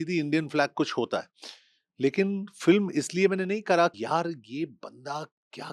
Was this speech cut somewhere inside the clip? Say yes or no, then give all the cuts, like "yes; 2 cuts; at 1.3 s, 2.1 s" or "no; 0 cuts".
yes; 1 cut; at 3.9 s